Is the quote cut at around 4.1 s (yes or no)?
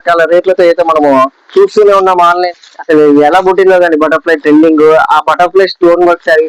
no